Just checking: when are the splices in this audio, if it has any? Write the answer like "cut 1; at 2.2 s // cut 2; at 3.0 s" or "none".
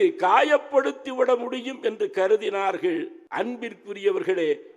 cut 1; at 3.2 s